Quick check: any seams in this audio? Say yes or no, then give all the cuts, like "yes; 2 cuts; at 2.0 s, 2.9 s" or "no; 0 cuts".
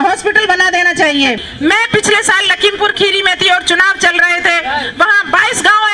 yes; 1 cut; at 1.5 s